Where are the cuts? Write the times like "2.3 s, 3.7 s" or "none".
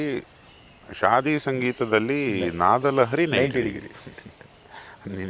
none